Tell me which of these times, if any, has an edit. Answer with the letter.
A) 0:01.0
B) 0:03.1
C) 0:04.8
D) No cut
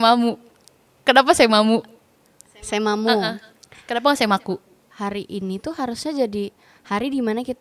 C